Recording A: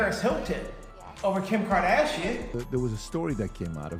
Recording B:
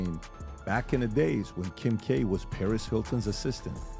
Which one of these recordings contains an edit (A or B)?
A